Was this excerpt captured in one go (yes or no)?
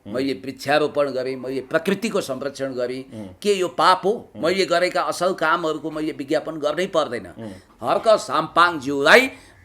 no